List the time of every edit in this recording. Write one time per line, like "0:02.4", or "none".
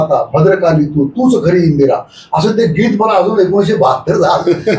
none